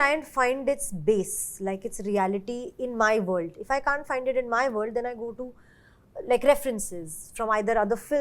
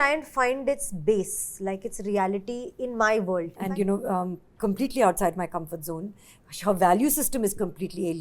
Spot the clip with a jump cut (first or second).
second